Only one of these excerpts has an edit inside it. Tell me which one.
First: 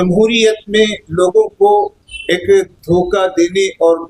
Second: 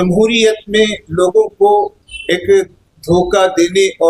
first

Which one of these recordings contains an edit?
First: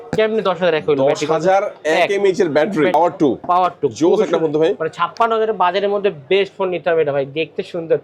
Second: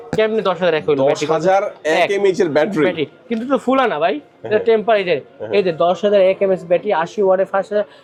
first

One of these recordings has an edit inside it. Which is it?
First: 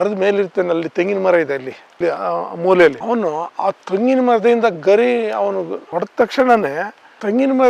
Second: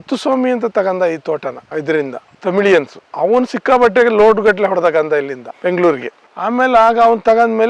second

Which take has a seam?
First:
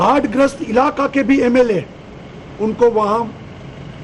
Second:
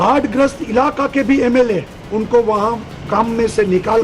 second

